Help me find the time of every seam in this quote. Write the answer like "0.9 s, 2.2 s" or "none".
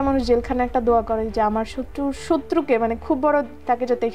none